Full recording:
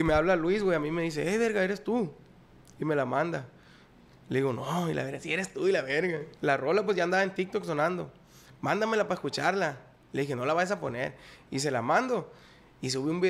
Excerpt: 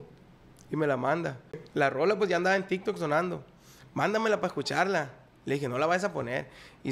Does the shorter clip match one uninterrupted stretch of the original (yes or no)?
no